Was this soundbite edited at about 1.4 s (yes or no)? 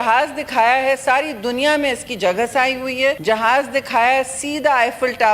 no